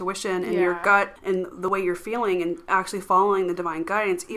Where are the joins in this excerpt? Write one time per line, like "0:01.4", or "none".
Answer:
0:01.5